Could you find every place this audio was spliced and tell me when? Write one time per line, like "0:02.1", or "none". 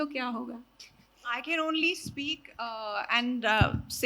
none